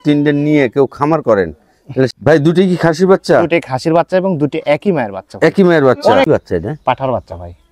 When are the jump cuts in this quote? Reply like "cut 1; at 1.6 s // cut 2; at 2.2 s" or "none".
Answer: cut 1; at 2.1 s // cut 2; at 6.3 s